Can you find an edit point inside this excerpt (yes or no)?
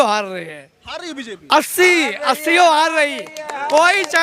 no